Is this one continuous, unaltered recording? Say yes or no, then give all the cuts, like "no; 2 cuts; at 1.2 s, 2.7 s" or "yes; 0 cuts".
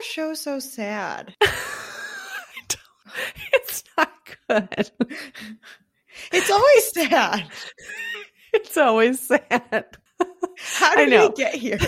no; 1 cut; at 1.2 s